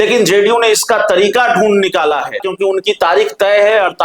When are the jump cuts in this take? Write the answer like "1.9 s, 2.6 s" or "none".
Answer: 2.5 s